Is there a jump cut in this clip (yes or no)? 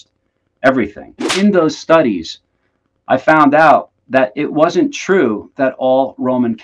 yes